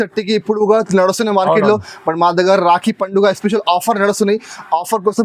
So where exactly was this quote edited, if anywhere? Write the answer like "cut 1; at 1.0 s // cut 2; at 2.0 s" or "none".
none